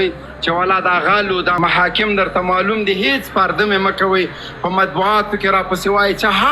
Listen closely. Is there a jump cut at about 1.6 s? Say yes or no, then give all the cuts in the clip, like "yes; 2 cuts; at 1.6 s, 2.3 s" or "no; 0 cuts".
yes; 1 cut; at 1.6 s